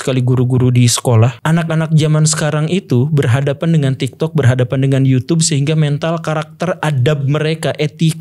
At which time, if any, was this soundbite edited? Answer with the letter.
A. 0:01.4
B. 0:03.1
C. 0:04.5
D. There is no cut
A